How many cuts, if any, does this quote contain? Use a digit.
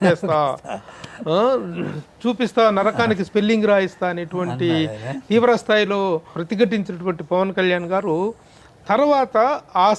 1